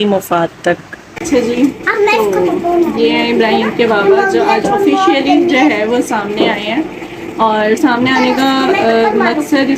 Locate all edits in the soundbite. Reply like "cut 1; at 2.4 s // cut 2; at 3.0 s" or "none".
cut 1; at 1.2 s